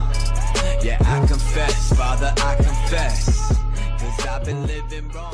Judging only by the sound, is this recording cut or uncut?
uncut